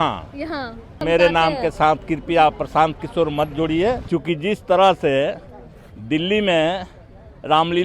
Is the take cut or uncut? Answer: cut